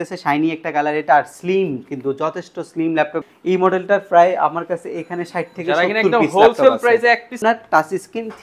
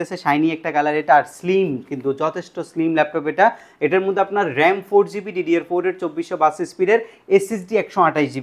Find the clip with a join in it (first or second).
first